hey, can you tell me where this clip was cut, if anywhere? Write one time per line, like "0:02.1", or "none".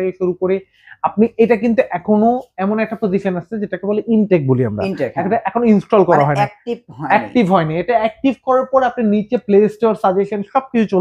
none